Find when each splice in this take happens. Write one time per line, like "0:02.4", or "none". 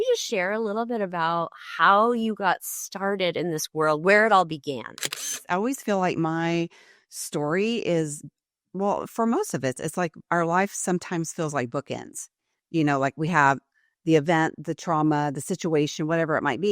0:05.4

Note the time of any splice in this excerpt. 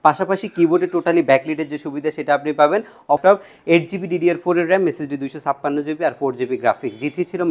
0:03.2

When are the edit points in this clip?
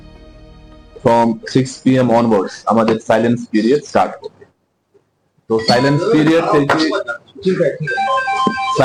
none

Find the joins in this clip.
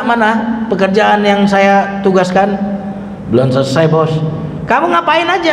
none

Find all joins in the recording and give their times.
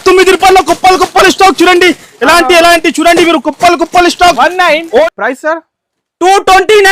0:05.1

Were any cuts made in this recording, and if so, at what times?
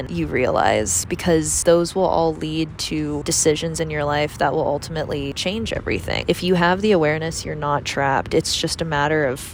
none

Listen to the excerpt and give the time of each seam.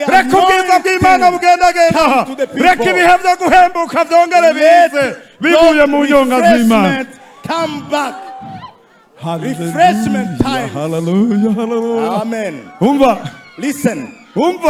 none

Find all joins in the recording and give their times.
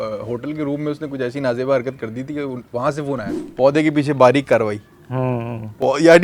0:03.4

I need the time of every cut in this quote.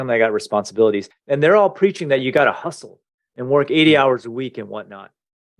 0:01.1

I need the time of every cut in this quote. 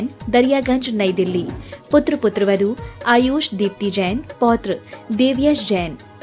none

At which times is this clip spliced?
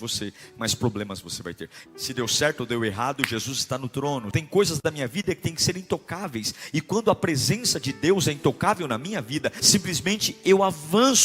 0:01.7
0:04.3
0:09.6

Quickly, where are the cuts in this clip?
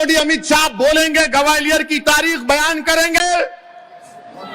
none

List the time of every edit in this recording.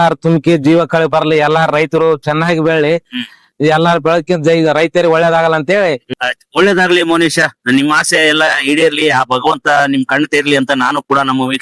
none

